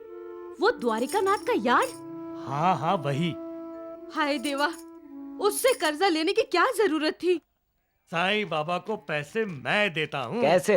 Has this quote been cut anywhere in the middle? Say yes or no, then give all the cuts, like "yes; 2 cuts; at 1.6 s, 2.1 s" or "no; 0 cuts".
yes; 1 cut; at 7.4 s